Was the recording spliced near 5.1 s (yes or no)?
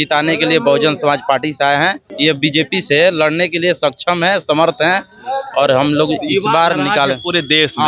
no